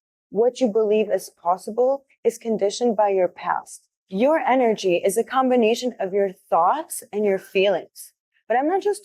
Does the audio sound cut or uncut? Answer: cut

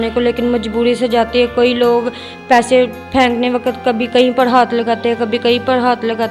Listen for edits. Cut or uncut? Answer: uncut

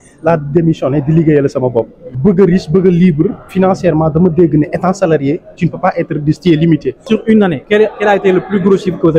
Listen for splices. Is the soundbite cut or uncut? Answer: cut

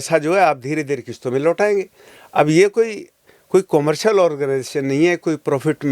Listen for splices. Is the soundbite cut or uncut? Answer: uncut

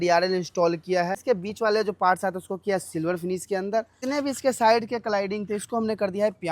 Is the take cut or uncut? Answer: cut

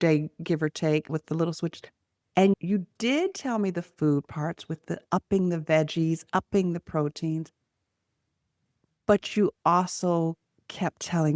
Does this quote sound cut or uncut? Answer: cut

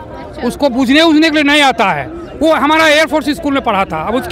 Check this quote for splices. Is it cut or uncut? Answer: uncut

